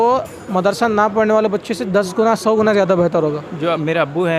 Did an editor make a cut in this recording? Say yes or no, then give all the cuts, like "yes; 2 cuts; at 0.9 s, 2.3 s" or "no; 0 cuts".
yes; 1 cut; at 3.5 s